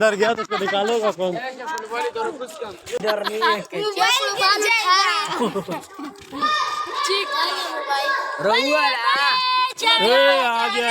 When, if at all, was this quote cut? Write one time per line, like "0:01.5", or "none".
0:03.0